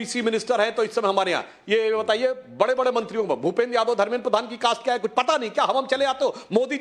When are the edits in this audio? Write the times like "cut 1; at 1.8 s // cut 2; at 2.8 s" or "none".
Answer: none

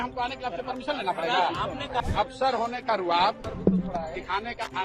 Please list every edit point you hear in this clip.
cut 1; at 2.0 s

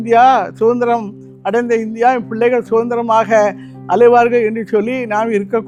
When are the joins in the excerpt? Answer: none

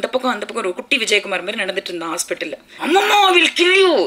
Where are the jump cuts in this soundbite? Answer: cut 1; at 2.7 s

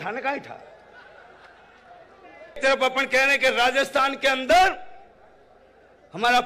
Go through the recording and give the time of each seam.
cut 1; at 2.6 s

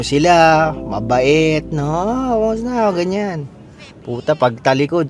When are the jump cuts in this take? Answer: none

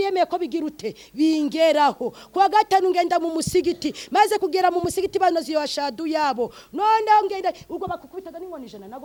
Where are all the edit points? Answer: none

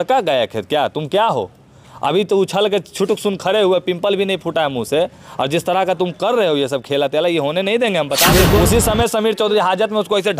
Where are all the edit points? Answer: cut 1; at 8.3 s

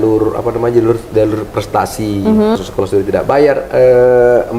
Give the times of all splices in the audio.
cut 1; at 2.6 s

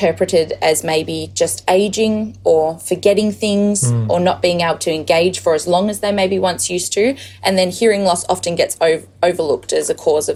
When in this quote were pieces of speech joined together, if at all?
none

